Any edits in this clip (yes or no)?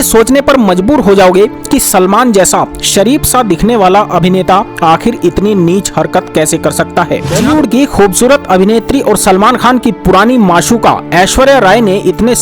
yes